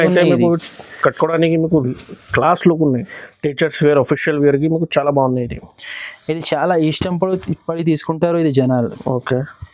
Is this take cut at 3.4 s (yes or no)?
no